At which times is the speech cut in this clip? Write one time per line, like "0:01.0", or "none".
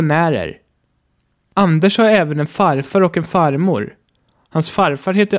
0:01.0
0:04.1